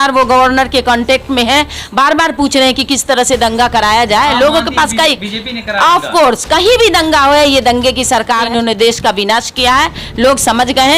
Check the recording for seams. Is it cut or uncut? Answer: cut